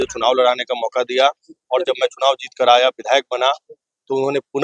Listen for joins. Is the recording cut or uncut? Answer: uncut